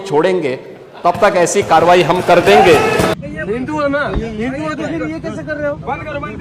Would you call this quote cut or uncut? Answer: cut